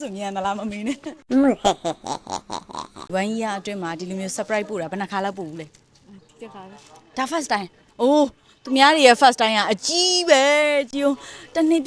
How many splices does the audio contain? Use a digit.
1